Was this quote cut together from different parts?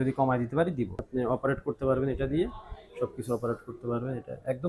yes; 1 cut; at 1.0 s

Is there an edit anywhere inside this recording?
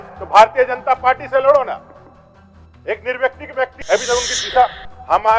yes; 1 cut; at 3.8 s

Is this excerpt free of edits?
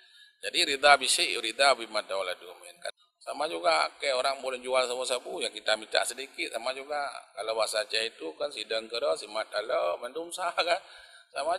no; 1 cut; at 2.9 s

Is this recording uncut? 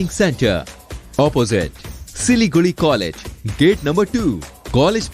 yes; 0 cuts

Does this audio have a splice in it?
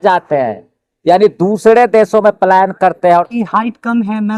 yes; 1 cut; at 3.3 s

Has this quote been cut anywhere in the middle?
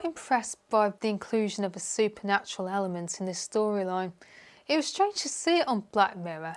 yes; 1 cut; at 1.0 s

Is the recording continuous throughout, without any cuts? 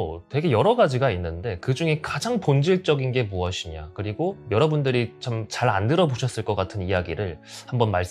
yes; 0 cuts

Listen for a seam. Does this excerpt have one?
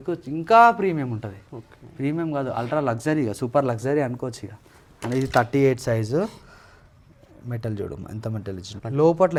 no; 0 cuts

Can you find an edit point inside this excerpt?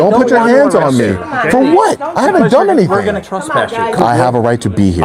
yes; 1 cut; at 4.0 s

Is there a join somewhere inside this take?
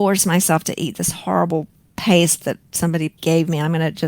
yes; 1 cut; at 3.2 s

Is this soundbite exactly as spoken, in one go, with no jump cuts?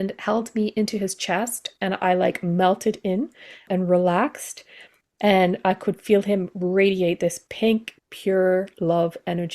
no; 1 cut; at 3.6 s

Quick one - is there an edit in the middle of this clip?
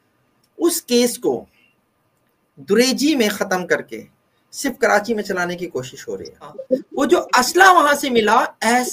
yes; 1 cut; at 6.6 s

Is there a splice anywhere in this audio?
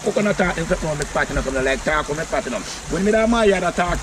no; 0 cuts

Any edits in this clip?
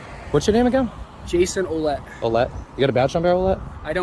no; 0 cuts

